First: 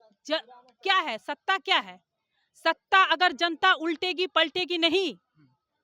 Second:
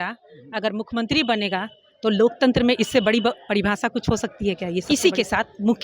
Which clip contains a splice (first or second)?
second